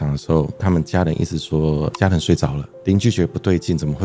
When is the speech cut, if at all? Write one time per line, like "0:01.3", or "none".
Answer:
none